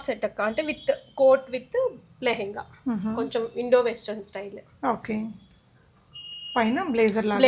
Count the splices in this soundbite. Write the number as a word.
zero